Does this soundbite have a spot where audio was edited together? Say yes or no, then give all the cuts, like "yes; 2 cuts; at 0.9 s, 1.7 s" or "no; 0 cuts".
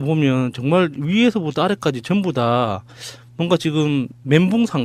no; 0 cuts